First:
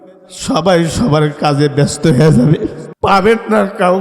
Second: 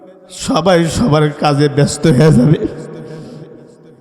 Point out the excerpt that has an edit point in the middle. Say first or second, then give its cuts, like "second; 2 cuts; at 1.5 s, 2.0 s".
first; 1 cut; at 2.8 s